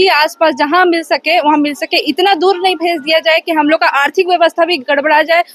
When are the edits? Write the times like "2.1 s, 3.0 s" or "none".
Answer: none

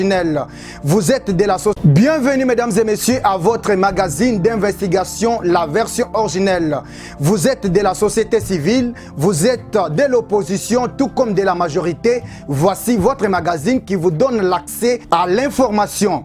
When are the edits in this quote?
1.8 s

